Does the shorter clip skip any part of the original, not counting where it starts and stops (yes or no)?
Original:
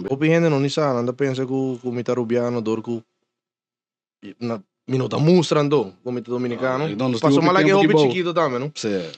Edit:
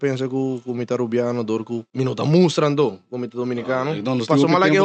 yes